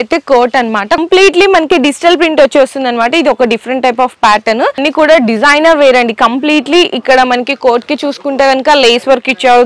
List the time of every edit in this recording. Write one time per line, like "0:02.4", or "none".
0:01.0
0:04.8